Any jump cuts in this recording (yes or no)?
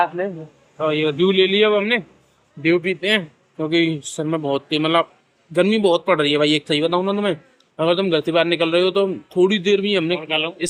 no